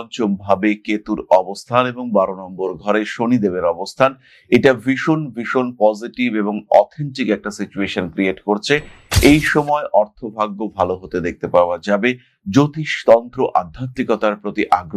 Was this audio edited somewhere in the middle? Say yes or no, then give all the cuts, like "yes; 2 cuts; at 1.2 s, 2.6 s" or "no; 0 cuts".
no; 0 cuts